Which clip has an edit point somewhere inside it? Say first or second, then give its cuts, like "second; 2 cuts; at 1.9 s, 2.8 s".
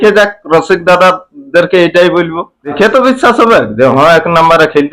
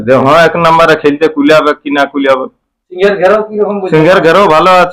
first; 1 cut; at 2.7 s